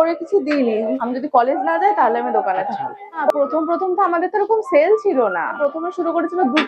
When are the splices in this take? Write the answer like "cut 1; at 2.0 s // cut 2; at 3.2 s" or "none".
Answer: cut 1; at 0.9 s // cut 2; at 3.3 s // cut 3; at 5.6 s